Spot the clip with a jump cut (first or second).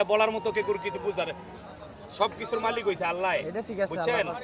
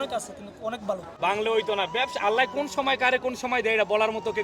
second